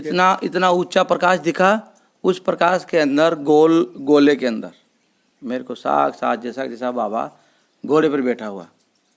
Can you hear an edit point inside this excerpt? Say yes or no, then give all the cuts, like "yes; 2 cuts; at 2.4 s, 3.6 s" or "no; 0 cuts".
no; 0 cuts